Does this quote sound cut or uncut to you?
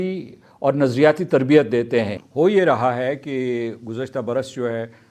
cut